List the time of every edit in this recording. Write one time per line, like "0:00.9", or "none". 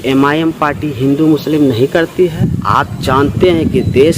0:02.6